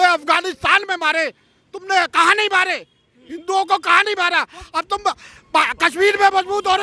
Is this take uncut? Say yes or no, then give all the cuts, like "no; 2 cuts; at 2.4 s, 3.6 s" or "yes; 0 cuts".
yes; 0 cuts